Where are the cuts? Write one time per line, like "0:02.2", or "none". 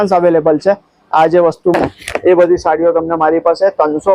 0:01.7